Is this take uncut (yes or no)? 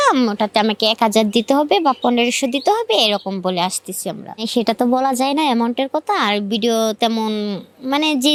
yes